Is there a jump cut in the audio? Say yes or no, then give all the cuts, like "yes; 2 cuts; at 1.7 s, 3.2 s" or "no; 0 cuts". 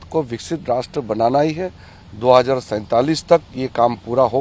no; 0 cuts